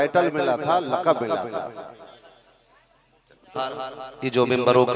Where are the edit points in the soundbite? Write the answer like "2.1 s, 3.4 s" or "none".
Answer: 3.5 s